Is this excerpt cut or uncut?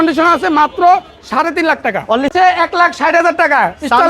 cut